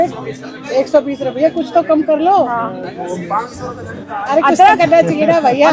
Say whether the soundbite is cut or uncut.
uncut